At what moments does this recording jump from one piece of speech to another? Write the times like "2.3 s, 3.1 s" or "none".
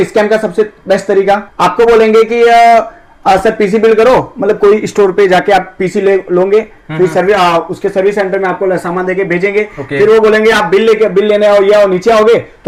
none